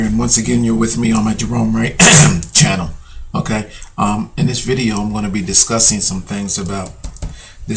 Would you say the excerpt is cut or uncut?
uncut